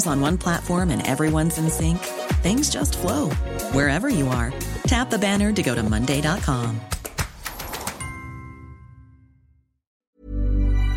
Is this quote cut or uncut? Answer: cut